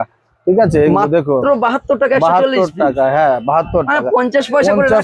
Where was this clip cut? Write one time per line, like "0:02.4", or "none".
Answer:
none

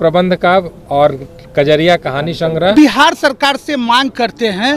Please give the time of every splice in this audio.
0:02.7

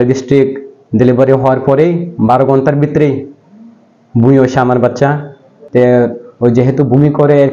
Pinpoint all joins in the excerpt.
0:05.6

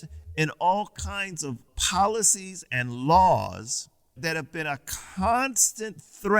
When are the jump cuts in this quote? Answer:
0:01.7

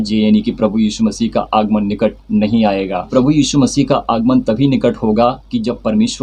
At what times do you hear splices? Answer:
none

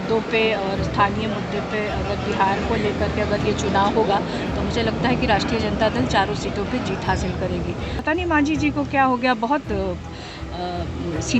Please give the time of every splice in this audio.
0:08.0

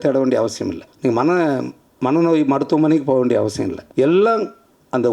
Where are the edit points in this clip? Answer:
0:00.9
0:03.8

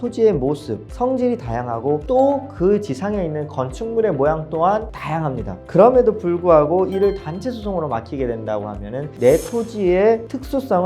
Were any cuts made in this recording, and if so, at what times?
none

